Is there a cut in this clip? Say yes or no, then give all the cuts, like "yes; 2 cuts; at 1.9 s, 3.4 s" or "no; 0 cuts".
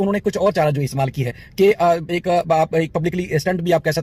no; 0 cuts